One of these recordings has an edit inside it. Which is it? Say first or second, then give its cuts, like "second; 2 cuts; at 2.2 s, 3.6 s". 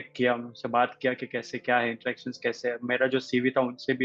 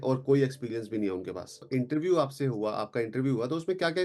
second; 1 cut; at 1.6 s